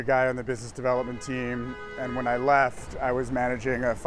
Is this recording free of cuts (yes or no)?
yes